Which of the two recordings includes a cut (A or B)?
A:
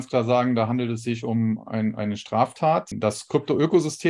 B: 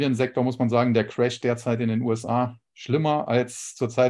A